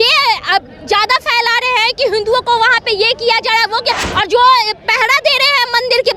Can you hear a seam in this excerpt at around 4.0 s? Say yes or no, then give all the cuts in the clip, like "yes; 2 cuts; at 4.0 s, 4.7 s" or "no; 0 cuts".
yes; 1 cut; at 4.0 s